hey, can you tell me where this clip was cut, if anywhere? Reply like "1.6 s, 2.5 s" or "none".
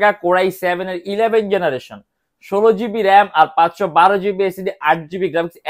none